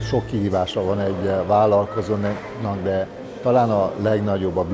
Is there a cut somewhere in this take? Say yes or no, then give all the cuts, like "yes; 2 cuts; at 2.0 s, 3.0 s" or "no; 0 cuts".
no; 0 cuts